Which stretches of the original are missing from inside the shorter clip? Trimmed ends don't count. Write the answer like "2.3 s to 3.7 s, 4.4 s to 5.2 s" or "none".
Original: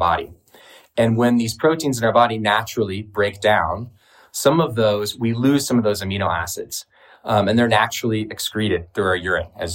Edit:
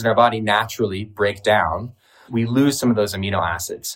4.2 s to 5.1 s